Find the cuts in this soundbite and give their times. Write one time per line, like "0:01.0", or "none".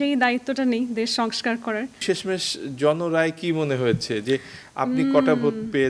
0:02.0